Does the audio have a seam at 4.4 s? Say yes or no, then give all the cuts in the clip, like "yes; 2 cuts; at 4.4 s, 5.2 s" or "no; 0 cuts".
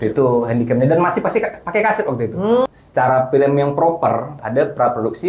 yes; 2 cuts; at 2.7 s, 4.4 s